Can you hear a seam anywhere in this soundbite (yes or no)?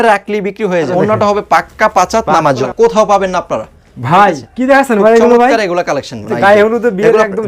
yes